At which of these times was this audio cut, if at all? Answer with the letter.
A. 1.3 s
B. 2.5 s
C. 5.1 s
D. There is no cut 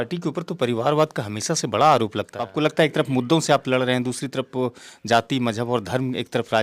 B